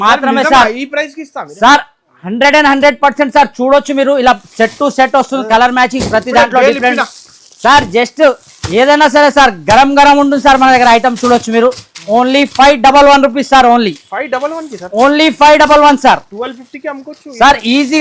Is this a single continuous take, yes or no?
yes